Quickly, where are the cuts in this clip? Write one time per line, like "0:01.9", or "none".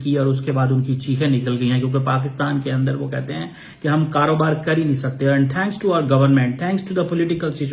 none